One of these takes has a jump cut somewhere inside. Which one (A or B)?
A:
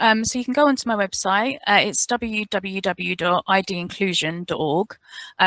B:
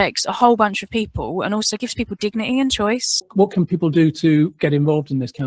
B